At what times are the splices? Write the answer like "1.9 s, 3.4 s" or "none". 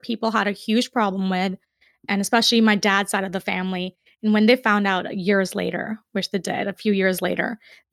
none